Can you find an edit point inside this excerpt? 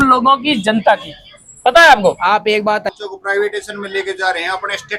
yes; 1 cut; at 2.8 s

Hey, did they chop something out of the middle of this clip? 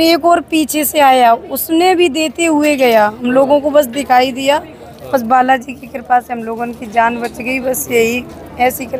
no; 0 cuts

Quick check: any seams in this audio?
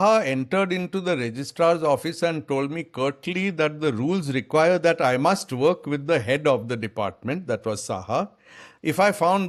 no; 0 cuts

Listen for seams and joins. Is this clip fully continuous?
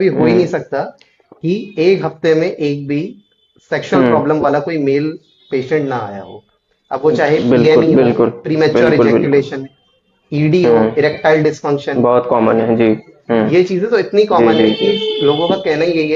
yes; 0 cuts

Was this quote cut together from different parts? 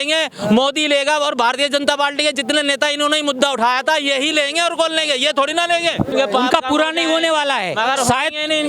yes; 1 cut; at 6.1 s

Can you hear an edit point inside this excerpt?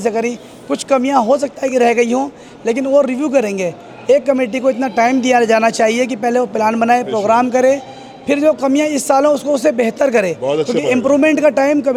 no; 0 cuts

